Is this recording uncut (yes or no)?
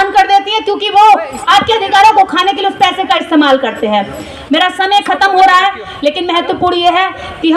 yes